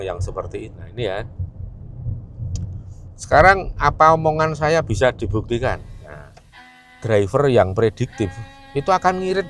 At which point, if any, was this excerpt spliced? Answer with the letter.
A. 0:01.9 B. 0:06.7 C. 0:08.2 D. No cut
B